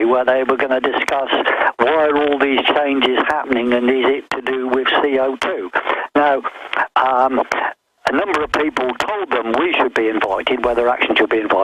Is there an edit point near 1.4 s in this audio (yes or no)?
yes